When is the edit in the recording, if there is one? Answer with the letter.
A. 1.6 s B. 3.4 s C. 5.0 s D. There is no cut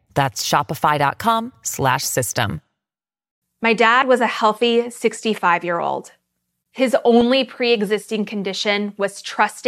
B